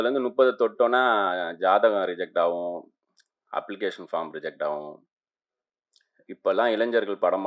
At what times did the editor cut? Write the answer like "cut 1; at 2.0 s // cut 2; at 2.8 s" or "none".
none